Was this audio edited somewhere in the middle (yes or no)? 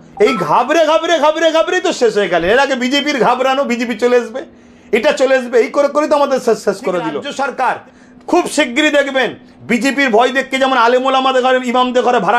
yes